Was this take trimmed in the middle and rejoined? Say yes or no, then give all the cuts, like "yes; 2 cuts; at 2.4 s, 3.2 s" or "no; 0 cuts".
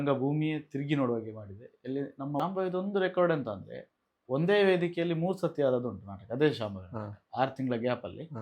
yes; 1 cut; at 2.4 s